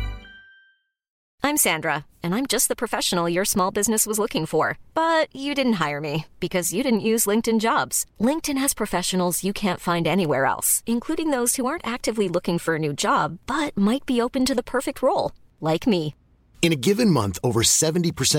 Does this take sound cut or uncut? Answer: cut